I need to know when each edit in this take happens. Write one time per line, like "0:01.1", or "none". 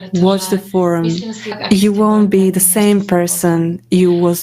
0:01.6